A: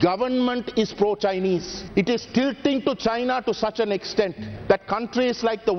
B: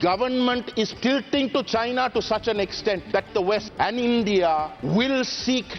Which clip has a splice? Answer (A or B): B